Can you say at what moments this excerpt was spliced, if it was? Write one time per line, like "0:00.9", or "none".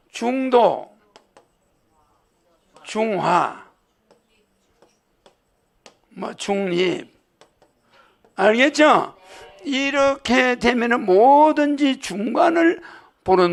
none